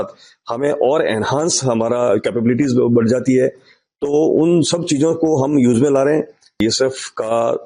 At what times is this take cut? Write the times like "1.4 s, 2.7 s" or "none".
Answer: 6.6 s